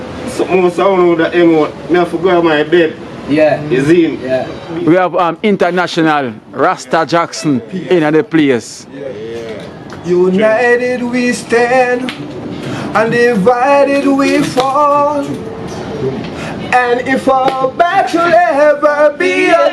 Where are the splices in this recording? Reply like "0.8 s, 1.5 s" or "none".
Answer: 4.6 s